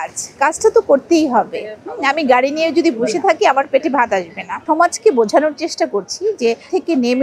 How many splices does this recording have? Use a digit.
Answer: 1